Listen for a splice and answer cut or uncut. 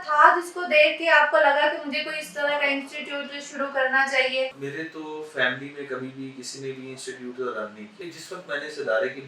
cut